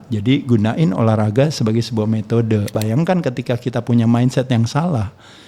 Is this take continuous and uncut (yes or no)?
no